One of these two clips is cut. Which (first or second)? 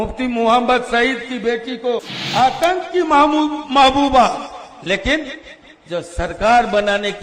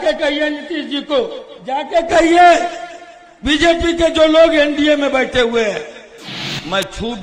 first